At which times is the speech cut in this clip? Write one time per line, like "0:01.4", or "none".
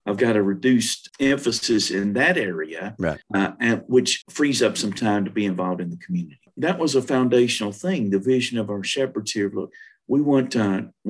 0:01.0
0:03.2
0:04.2
0:06.5